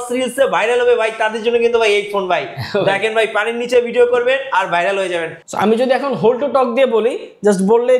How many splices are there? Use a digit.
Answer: 1